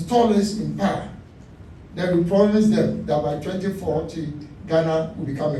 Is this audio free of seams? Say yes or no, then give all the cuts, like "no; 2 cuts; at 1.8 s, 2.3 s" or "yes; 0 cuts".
yes; 0 cuts